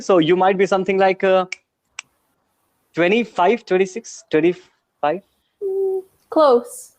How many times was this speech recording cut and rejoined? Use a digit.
0